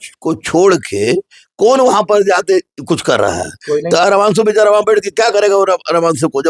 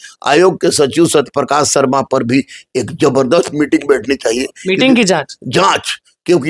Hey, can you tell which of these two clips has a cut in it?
first; 1 cut; at 4.0 s

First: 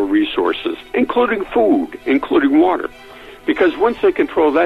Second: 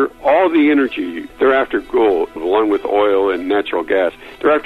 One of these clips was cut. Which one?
second; 2 cuts; at 1.2 s, 2.4 s

